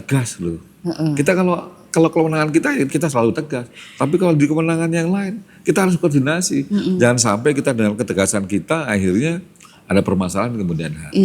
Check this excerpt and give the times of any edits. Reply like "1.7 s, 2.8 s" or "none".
2.9 s